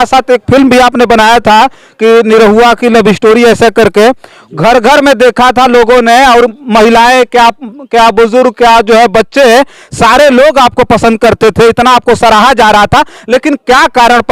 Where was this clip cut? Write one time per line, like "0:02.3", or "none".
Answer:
none